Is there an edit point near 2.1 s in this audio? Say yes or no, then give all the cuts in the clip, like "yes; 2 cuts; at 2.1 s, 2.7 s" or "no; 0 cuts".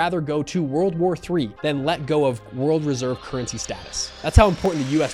no; 0 cuts